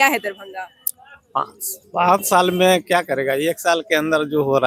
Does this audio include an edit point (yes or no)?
no